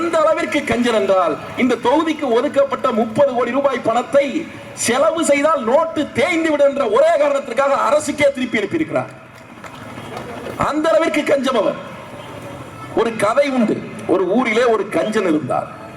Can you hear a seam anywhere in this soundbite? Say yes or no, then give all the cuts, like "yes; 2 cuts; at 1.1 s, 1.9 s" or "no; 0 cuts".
no; 0 cuts